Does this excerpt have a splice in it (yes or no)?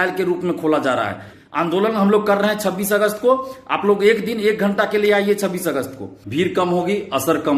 yes